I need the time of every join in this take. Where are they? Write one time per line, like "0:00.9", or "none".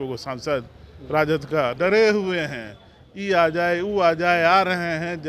0:01.7